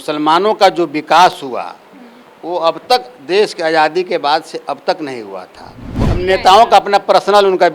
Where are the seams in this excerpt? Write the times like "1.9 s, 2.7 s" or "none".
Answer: 6.0 s